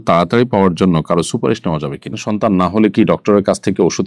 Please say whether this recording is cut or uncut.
cut